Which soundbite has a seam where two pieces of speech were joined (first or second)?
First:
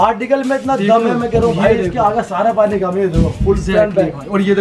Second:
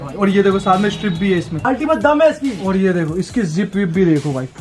second